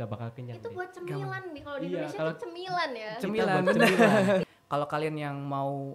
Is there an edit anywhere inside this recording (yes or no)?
yes